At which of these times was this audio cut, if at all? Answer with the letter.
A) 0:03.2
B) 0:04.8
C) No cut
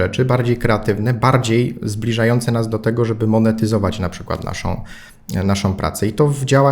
C